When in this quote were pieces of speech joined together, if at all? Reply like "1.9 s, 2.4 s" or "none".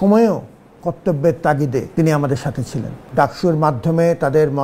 1.9 s, 3.0 s